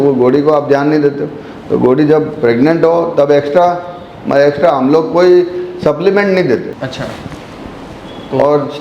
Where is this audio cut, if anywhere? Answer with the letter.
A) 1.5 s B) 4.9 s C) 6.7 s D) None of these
C